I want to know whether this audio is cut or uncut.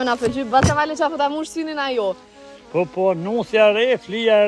uncut